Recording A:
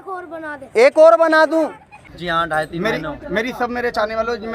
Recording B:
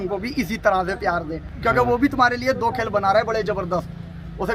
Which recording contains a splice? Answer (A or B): A